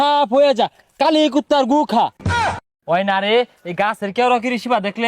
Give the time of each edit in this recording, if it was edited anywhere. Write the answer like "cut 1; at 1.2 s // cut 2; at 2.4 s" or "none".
cut 1; at 2.2 s